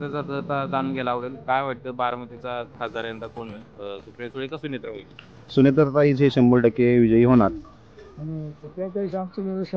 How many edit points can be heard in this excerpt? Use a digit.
1